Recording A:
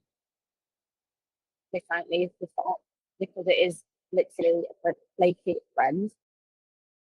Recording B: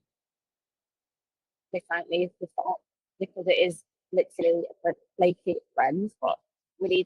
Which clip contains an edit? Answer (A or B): B